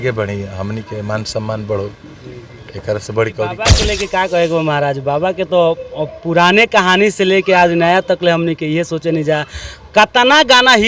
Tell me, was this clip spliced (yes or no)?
yes